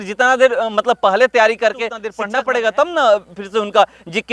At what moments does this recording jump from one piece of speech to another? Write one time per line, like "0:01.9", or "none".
0:02.2